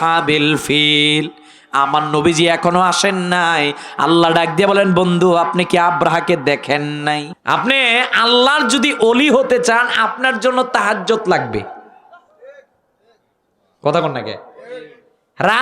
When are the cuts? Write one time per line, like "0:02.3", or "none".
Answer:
0:07.3